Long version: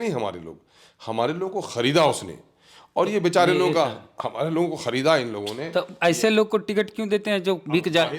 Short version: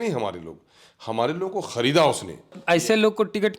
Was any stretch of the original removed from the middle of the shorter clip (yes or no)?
yes